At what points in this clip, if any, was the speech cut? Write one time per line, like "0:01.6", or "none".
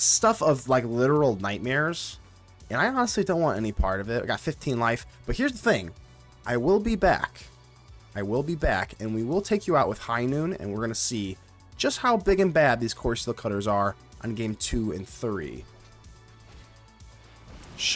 none